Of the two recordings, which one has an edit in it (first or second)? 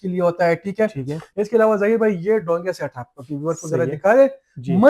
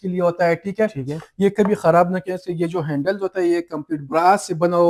first